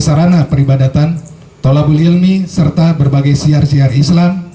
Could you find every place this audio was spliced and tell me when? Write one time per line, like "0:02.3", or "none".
none